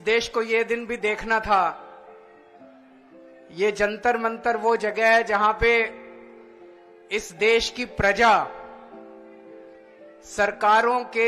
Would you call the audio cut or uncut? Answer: cut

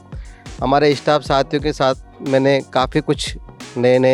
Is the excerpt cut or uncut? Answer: uncut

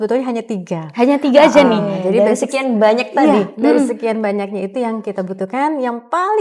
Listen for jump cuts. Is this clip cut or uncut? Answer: uncut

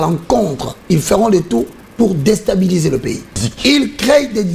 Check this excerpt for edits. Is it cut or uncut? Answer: cut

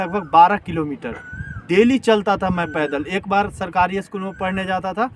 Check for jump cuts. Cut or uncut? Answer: uncut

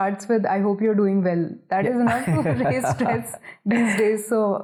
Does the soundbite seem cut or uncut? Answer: uncut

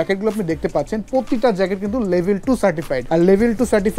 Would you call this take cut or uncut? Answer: cut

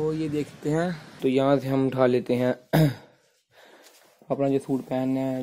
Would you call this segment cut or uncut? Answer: cut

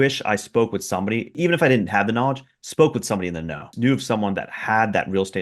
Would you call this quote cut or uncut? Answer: cut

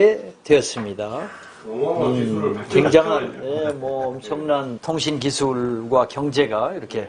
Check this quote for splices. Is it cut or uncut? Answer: cut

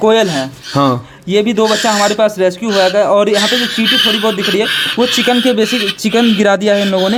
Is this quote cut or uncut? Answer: uncut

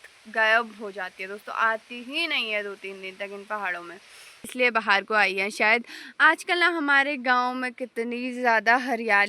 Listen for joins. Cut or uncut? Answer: cut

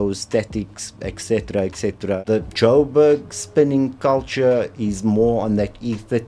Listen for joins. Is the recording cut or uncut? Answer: cut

